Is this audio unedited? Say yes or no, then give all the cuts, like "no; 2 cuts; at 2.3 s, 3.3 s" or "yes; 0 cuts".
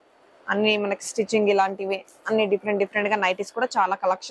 yes; 0 cuts